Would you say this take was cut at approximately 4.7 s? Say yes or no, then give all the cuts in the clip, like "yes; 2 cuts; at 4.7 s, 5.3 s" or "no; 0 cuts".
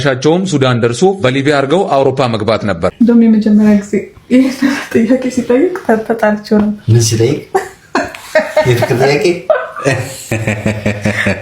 no; 1 cut; at 2.9 s